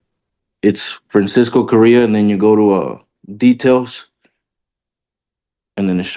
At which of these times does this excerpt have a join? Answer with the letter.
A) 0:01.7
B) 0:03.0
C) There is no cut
C